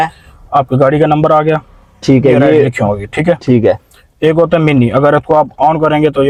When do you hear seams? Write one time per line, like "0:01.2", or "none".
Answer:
none